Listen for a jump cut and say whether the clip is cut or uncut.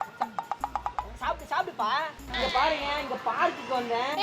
cut